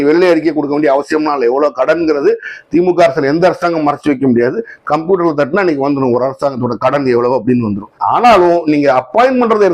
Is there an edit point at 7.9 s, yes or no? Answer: yes